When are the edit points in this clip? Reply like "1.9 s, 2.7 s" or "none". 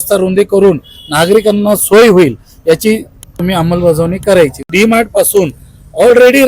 3.3 s, 4.7 s